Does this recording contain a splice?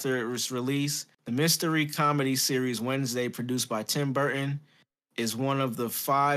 yes; 1 cut; at 1.1 s

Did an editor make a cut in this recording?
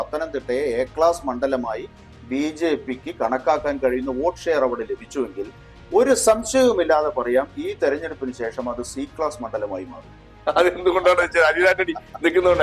no; 0 cuts

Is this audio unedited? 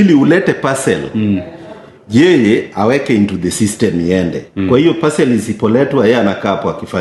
yes; 0 cuts

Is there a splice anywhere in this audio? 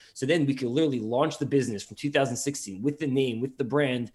no; 0 cuts

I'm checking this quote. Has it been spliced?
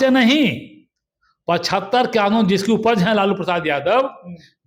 no; 0 cuts

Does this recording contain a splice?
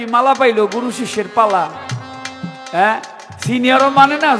no; 0 cuts

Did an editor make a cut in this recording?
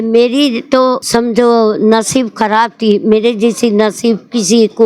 yes; 1 cut; at 1.0 s

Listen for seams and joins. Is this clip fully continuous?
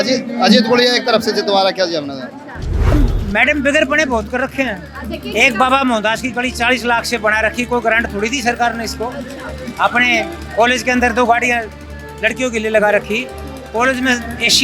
no; 1 cut; at 2.9 s

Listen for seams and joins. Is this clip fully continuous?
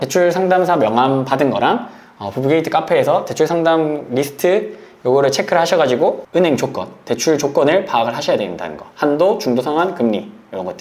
no; 1 cut; at 6.2 s

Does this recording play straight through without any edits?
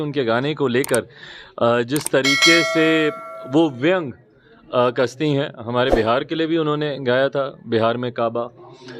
yes; 0 cuts

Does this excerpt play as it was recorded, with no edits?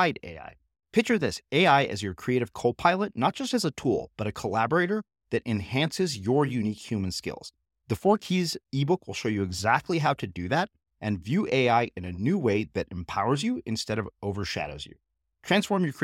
yes; 0 cuts

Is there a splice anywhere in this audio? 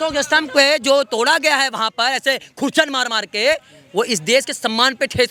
no; 0 cuts

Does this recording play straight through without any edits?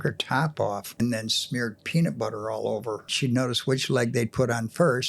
no; 2 cuts; at 1.0 s, 3.1 s

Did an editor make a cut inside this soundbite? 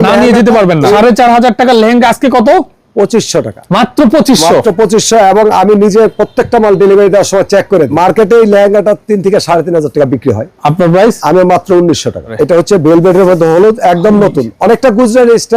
yes; 4 cuts; at 1.0 s, 3.6 s, 7.9 s, 12.3 s

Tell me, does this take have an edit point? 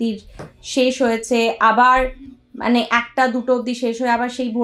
no; 0 cuts

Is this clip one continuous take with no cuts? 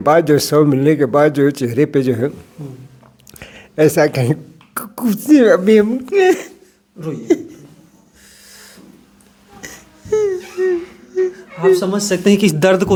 yes; 0 cuts

